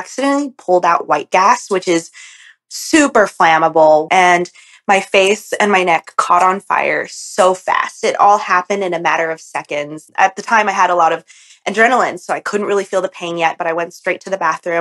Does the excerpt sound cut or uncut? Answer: cut